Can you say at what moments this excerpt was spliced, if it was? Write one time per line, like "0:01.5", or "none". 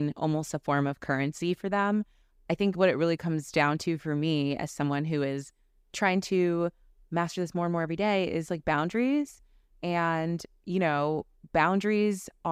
none